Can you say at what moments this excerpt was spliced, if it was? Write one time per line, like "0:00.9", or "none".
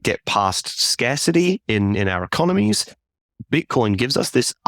0:03.4